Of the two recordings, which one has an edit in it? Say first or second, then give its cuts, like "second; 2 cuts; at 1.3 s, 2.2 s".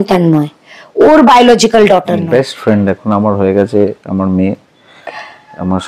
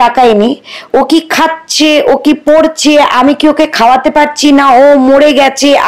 first; 1 cut; at 2.2 s